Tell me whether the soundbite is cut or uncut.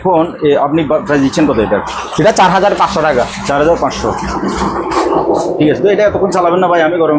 uncut